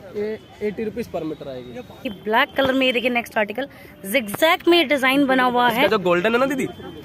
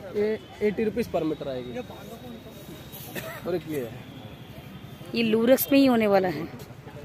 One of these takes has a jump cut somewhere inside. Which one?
first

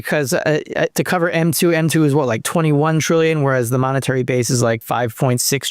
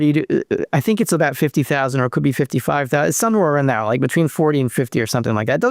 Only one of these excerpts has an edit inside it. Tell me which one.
first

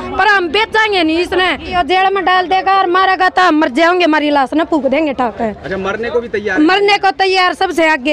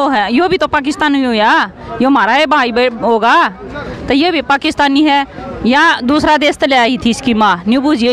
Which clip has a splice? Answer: first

